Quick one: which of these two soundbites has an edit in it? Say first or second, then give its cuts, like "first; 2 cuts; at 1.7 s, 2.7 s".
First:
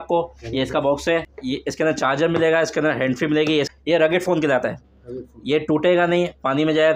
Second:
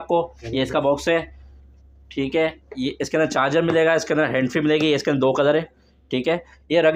first; 2 cuts; at 1.3 s, 3.7 s